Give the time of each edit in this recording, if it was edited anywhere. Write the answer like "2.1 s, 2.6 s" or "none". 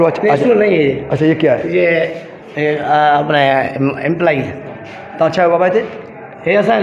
none